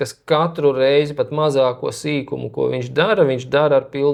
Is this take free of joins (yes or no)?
yes